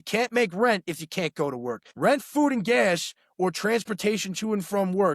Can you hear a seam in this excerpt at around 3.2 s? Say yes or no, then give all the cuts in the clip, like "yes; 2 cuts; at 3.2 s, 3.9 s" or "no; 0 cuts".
no; 1 cut; at 1.9 s